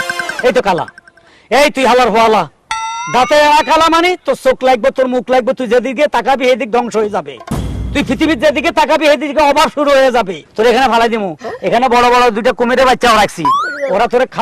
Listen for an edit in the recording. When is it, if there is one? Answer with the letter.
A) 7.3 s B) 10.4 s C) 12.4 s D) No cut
B